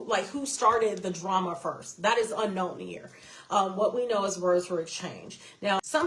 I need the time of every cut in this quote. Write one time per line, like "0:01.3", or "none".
none